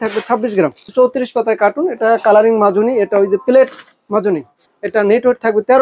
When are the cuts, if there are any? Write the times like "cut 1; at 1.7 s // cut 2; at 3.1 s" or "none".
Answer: cut 1; at 0.9 s // cut 2; at 4.5 s